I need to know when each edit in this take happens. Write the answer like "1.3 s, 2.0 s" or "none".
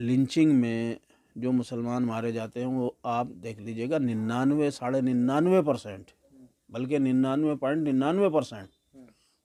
none